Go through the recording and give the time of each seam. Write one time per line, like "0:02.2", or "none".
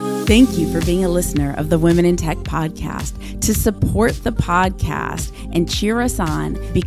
none